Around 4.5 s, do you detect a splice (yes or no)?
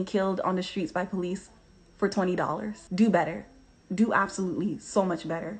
no